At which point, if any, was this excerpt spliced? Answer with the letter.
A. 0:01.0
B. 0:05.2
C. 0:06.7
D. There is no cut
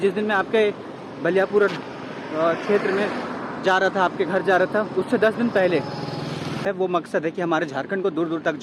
C